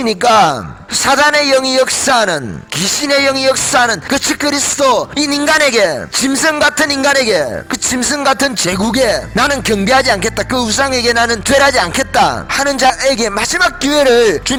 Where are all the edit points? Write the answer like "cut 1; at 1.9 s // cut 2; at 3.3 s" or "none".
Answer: none